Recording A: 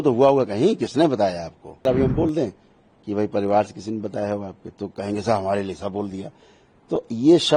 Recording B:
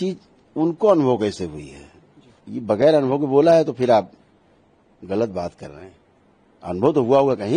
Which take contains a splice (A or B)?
A